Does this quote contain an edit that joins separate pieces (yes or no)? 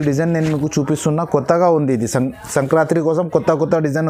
no